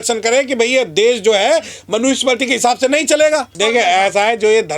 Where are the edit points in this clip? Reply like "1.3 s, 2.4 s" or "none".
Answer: 3.5 s

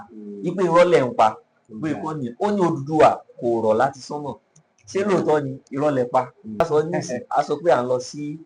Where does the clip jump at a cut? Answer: 6.6 s

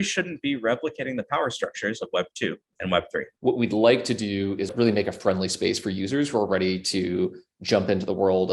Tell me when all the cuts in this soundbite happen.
3.3 s, 4.7 s

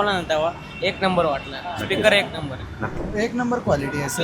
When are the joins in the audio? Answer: 2.9 s

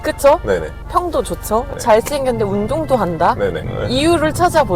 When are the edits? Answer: 1.7 s, 3.8 s

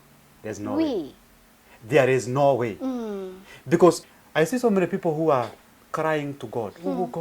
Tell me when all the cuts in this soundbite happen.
4.1 s

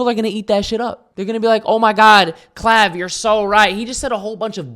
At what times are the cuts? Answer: 1.1 s

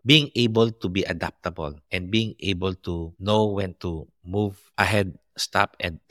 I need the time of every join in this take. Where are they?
none

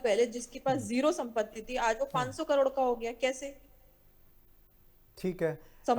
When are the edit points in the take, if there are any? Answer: none

